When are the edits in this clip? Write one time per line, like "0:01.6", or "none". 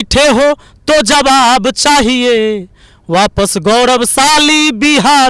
none